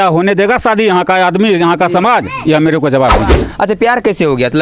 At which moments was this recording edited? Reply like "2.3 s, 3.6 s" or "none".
3.3 s